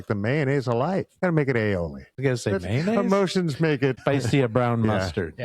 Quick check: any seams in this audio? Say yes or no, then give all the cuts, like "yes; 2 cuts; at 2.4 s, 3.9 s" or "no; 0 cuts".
yes; 3 cuts; at 1.1 s, 2.1 s, 3.9 s